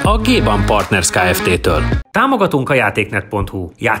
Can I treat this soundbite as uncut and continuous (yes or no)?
no